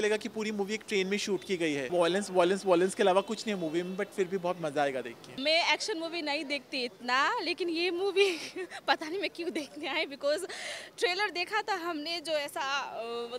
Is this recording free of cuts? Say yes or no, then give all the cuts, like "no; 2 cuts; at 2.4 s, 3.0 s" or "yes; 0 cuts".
no; 2 cuts; at 1.9 s, 5.4 s